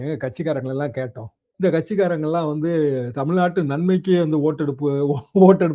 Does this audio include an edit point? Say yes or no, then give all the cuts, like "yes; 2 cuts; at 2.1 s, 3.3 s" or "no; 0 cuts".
no; 0 cuts